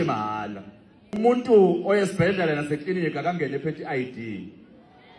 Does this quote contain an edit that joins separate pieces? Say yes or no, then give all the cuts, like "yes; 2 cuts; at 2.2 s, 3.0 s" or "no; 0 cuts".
yes; 1 cut; at 1.2 s